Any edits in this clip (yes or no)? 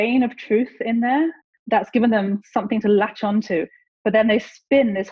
yes